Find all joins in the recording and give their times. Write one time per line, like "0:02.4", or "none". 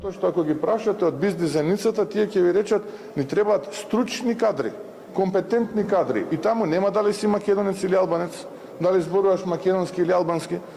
none